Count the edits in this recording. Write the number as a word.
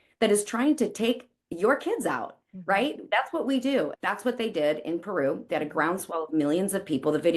one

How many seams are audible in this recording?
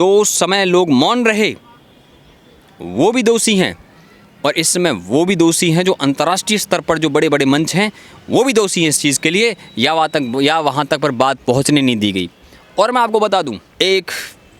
one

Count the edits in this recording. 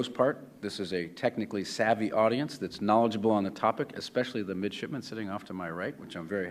zero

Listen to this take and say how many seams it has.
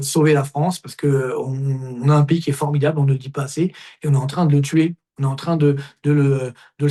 zero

